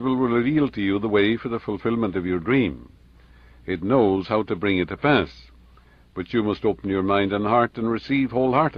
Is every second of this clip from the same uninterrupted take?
yes; 0 cuts

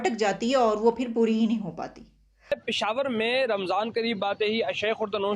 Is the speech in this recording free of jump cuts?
no; 1 cut; at 2.5 s

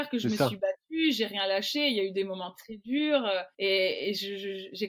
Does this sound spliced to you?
yes; 1 cut; at 3.5 s

